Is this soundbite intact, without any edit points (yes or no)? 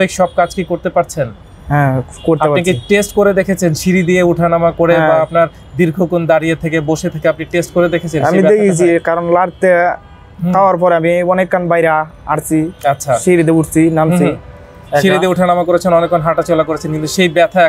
yes